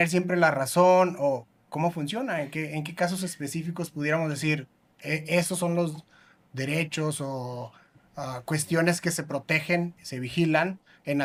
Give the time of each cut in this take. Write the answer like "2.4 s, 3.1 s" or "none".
none